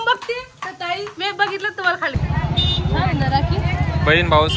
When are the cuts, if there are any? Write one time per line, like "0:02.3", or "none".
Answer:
0:02.1